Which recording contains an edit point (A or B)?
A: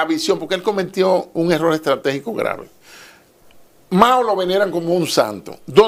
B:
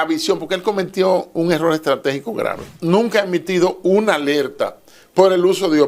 B